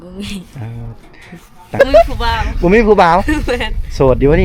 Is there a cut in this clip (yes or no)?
yes